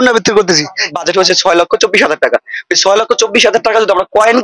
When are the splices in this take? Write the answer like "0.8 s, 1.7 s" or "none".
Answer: 0.9 s